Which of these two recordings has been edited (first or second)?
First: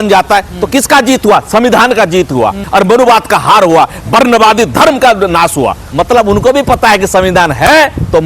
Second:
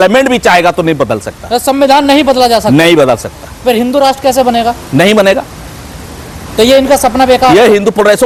first